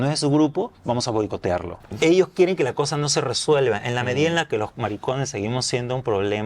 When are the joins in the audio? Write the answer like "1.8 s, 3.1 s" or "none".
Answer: 1.7 s